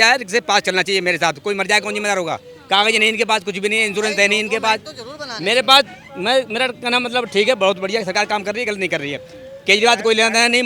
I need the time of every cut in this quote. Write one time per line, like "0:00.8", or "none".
none